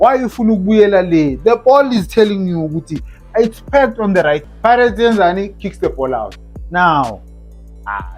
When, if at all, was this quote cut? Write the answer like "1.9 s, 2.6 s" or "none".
4.5 s